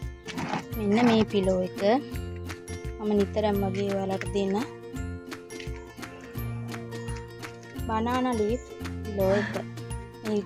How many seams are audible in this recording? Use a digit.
2